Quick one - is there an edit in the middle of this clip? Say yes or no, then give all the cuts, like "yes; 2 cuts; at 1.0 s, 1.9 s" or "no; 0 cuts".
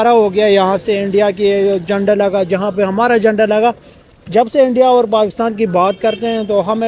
no; 0 cuts